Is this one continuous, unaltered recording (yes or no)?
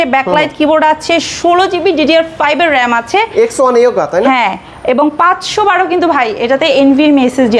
yes